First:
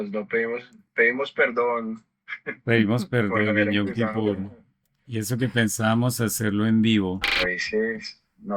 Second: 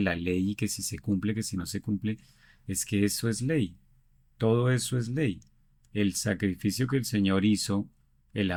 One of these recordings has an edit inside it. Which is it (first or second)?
first